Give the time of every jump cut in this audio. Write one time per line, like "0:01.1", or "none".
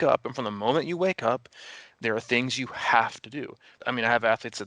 0:03.8